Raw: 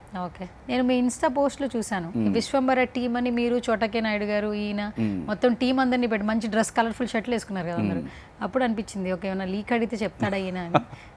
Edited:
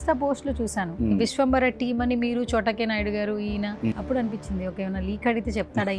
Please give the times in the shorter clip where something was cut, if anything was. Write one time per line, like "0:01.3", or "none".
0:03.9